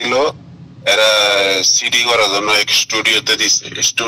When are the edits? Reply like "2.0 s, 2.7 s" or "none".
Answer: none